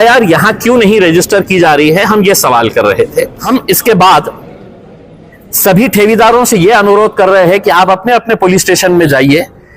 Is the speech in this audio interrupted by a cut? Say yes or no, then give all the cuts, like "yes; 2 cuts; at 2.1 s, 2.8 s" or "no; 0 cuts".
yes; 1 cut; at 3.4 s